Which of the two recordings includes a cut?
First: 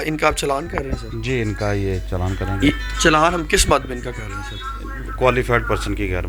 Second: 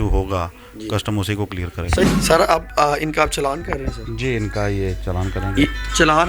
second; 1 cut; at 2.0 s

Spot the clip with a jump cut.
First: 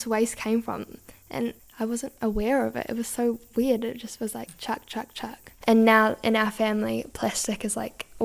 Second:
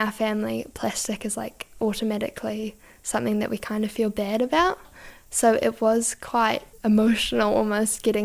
first; 1 cut; at 5.5 s

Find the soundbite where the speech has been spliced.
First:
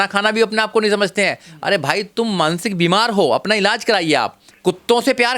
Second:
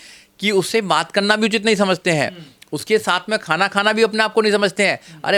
first; 1 cut; at 4.4 s

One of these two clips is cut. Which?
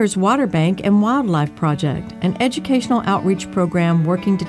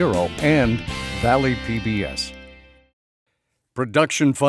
second; 1 cut; at 2.1 s

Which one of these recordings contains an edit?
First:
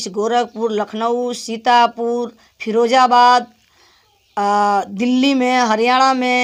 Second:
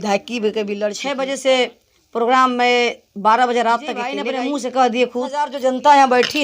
second; 3 cuts; at 1.0 s, 4.2 s, 5.6 s

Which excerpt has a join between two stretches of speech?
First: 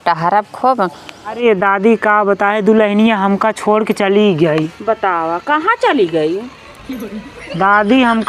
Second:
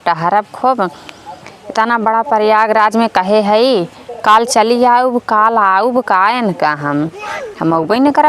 first; 1 cut; at 1.4 s

